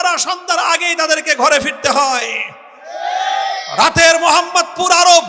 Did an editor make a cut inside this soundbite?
no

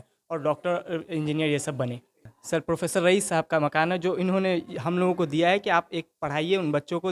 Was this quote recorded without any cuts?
no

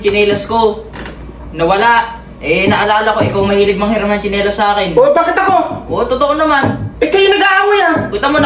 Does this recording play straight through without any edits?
yes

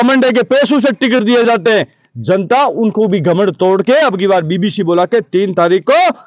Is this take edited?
no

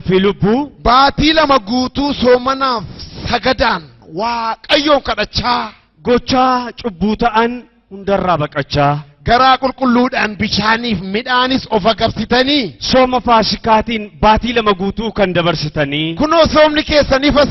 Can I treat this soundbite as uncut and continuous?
no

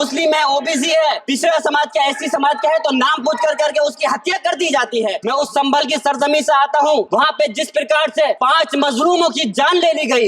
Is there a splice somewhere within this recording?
yes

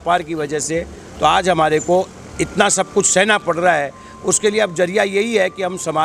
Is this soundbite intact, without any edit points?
yes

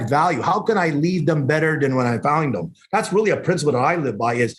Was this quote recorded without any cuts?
yes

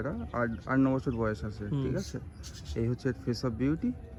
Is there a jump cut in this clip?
no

